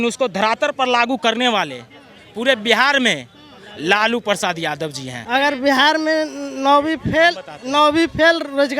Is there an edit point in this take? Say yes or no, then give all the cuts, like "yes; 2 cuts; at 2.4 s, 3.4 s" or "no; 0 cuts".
yes; 1 cut; at 5.1 s